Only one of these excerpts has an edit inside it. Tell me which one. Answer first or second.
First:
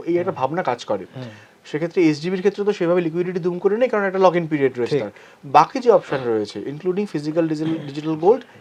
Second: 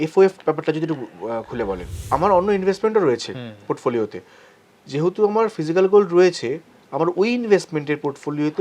second